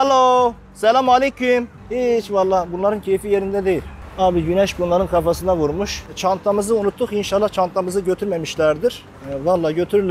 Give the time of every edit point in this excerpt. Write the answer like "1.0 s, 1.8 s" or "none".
4.0 s, 6.0 s